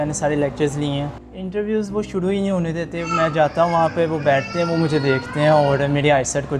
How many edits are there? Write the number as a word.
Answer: one